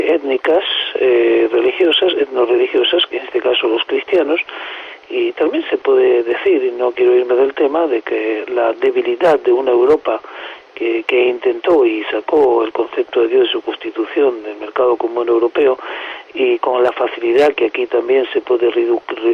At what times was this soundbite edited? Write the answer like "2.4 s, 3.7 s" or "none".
none